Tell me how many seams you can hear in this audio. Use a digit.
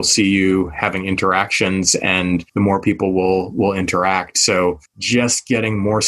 2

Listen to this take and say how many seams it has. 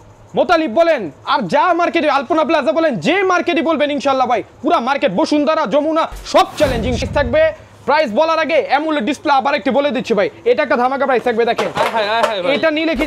1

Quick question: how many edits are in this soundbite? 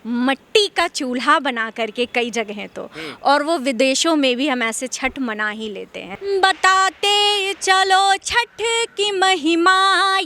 1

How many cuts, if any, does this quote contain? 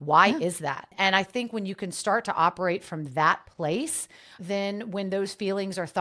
1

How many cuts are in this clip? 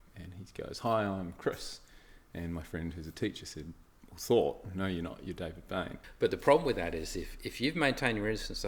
1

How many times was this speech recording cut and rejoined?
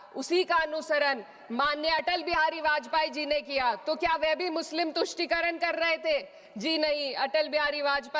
0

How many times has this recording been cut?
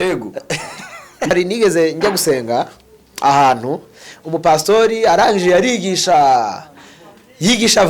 1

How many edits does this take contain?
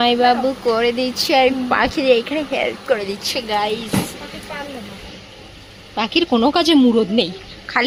0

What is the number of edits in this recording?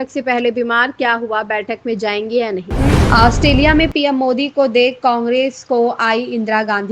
1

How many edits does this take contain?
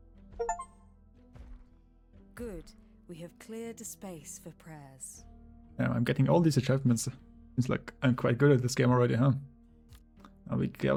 0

